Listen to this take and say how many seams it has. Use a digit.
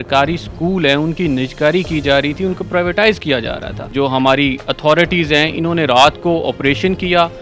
1